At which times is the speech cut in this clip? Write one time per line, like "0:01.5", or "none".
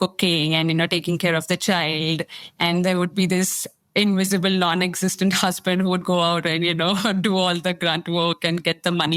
none